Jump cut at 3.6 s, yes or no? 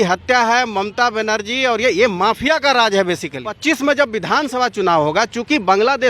yes